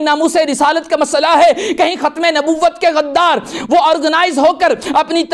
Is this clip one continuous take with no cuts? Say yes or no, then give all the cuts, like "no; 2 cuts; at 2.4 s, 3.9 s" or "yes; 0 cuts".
yes; 0 cuts